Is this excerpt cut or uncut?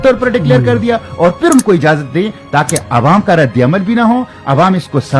uncut